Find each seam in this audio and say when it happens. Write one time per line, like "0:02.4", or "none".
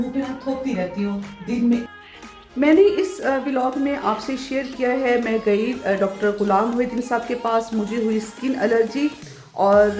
0:01.9